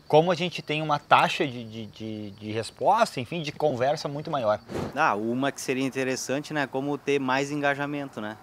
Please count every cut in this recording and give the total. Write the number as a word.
one